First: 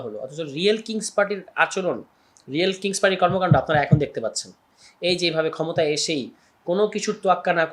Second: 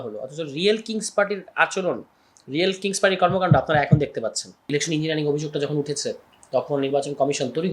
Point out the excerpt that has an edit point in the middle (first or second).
second